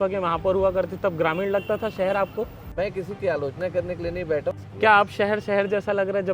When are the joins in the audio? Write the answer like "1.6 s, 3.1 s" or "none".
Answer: 2.6 s, 4.6 s

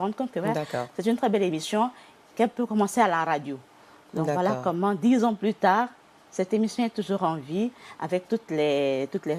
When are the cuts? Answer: none

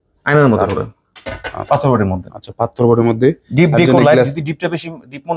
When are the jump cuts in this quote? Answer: 1.5 s

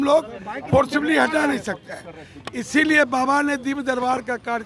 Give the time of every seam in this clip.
none

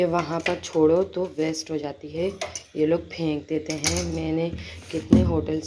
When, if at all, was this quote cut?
none

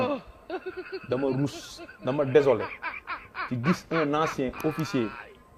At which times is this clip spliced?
none

